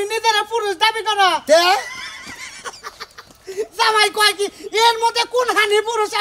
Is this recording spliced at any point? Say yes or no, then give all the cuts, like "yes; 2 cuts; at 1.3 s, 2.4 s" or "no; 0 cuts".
no; 0 cuts